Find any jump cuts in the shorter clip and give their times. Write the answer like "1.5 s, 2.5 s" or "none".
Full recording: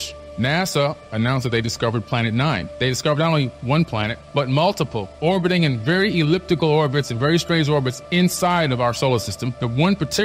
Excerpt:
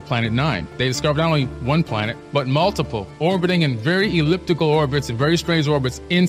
none